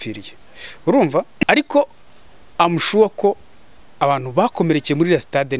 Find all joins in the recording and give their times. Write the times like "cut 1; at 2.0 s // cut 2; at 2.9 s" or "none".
cut 1; at 1.4 s